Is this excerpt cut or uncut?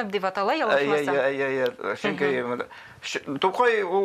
uncut